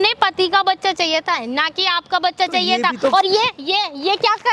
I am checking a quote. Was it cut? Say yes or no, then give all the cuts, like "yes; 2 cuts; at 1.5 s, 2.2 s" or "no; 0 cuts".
no; 0 cuts